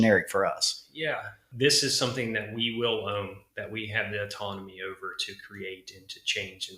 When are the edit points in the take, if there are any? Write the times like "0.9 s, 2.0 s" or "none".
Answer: 1.4 s

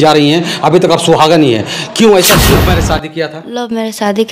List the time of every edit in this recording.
2.4 s

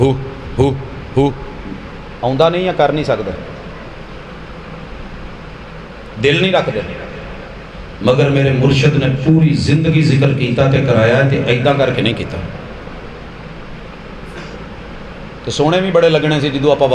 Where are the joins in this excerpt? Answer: none

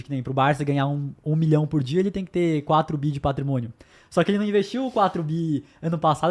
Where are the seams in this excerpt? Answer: none

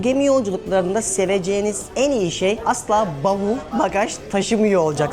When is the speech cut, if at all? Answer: 2.6 s

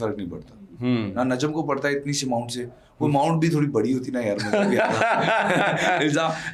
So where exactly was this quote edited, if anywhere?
none

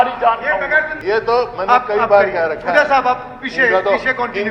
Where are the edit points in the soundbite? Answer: 0.9 s

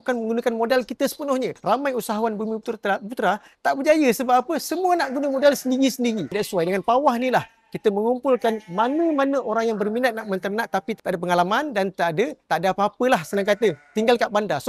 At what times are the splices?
1.5 s, 6.3 s, 12.4 s

